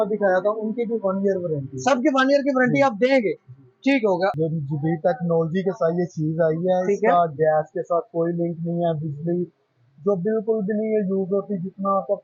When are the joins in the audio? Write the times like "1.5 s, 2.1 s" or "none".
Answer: 4.3 s